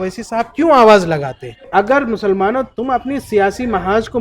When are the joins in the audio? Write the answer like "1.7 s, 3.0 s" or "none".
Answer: 1.6 s